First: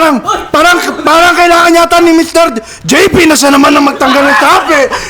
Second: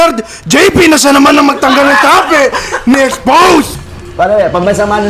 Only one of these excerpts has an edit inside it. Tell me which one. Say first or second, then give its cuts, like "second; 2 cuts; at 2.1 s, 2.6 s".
second; 1 cut; at 3.7 s